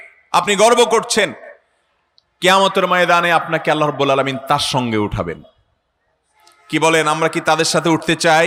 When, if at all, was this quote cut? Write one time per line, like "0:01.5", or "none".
none